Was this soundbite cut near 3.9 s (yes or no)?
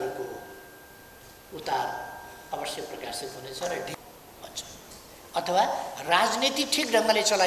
yes